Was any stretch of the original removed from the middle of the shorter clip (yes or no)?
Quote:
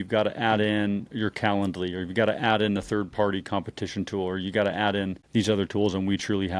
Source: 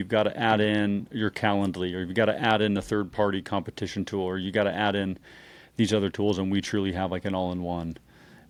yes